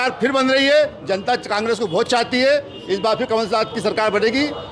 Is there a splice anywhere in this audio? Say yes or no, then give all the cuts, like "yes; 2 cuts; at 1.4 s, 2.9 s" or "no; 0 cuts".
no; 0 cuts